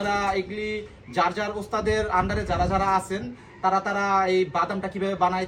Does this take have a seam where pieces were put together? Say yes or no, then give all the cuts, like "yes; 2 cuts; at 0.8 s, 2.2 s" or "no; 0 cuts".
no; 0 cuts